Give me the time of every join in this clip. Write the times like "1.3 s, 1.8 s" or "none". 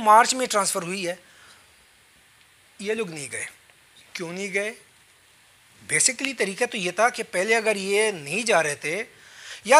none

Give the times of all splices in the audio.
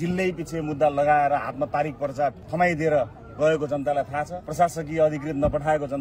2.5 s, 4.4 s

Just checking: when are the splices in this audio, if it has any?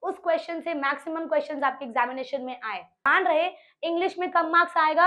3.0 s

